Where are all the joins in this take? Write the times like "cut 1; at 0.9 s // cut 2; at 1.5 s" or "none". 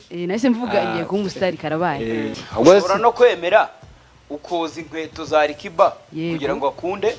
cut 1; at 2.4 s